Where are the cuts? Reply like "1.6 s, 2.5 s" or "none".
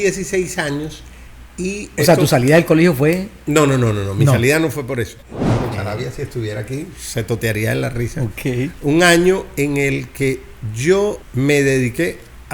5.2 s